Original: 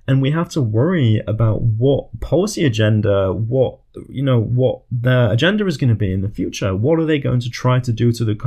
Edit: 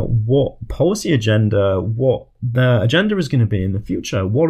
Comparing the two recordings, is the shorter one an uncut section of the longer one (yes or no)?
no